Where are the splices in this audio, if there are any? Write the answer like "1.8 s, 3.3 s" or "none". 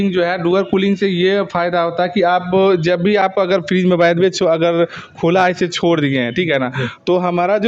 none